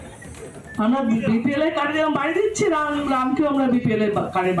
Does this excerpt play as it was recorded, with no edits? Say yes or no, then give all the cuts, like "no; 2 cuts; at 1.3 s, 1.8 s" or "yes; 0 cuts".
yes; 0 cuts